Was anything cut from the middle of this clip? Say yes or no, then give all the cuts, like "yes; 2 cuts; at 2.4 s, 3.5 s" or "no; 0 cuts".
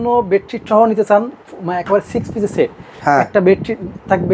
no; 0 cuts